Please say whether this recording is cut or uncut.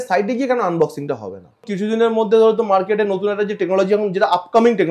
cut